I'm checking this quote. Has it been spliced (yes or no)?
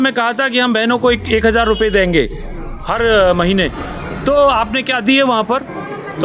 no